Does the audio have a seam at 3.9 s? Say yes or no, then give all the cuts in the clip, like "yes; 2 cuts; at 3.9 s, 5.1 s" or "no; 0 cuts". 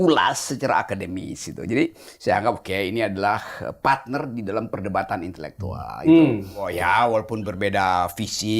no; 1 cut; at 6.7 s